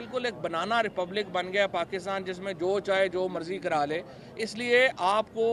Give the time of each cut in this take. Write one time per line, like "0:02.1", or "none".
none